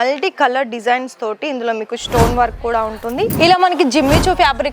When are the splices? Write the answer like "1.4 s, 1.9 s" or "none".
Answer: 3.3 s